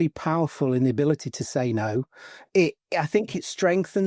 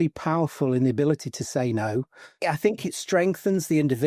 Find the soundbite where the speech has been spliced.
second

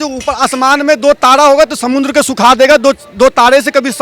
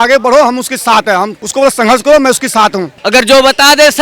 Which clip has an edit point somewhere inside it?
second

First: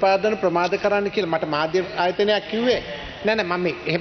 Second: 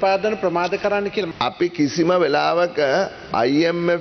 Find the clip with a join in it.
second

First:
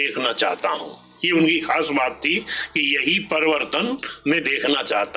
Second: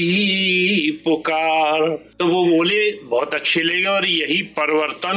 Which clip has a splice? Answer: second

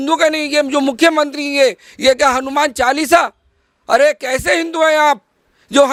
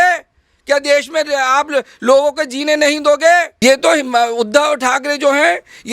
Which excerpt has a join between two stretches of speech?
second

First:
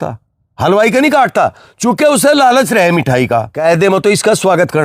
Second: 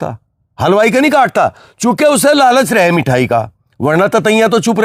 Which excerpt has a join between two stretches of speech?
first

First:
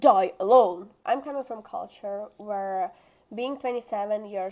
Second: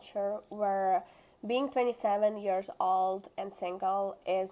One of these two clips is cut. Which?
first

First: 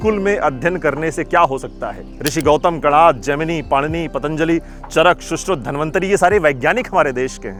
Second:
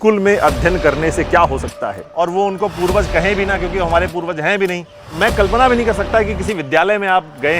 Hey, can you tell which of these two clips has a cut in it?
second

